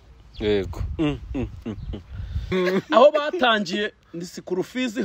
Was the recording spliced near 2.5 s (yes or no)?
yes